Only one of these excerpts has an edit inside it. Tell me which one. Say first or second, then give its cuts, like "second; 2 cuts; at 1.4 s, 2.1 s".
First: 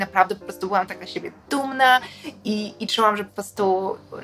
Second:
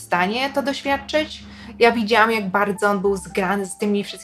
second; 1 cut; at 1.6 s